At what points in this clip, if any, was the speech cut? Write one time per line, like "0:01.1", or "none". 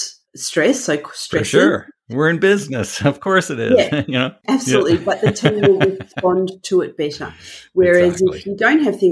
none